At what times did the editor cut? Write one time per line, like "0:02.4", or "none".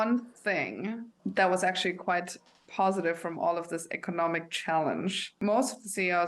0:01.1
0:05.4